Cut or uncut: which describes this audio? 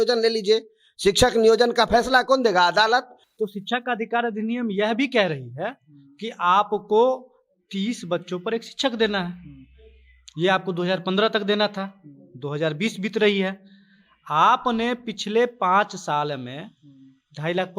cut